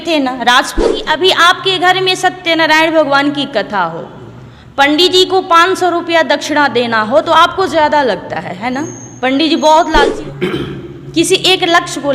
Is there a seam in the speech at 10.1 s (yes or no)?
yes